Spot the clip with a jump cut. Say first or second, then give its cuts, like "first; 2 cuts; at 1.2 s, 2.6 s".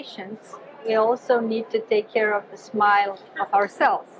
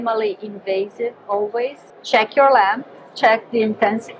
second; 1 cut; at 1.9 s